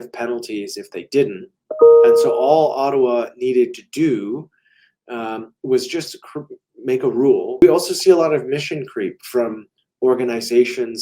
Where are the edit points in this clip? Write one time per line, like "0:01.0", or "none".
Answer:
0:07.6